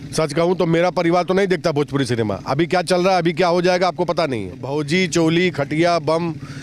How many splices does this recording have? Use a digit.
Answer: 1